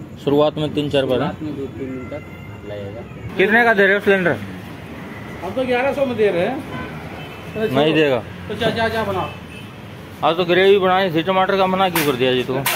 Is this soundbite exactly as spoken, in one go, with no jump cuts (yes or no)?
no